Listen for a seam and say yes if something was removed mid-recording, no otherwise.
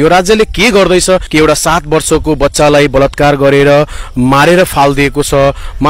yes